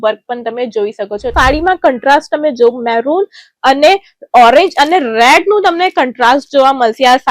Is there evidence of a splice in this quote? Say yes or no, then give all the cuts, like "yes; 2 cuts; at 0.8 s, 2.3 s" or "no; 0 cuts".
yes; 1 cut; at 1.3 s